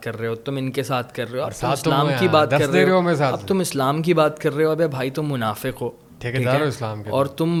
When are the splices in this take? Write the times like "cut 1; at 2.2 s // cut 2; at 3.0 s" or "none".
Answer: none

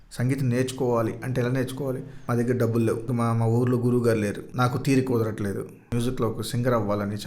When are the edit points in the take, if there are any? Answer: cut 1; at 2.1 s // cut 2; at 3.1 s // cut 3; at 4.5 s // cut 4; at 5.8 s

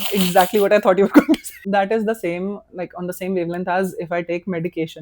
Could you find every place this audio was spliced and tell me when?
cut 1; at 1.5 s

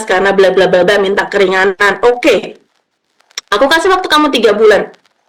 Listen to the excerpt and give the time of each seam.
none

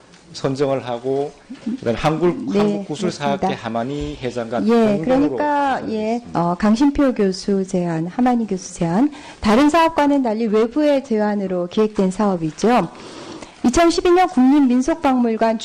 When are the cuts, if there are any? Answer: cut 1; at 9.0 s

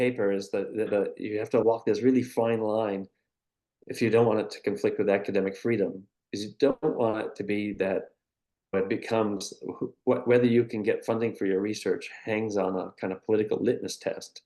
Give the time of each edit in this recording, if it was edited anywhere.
none

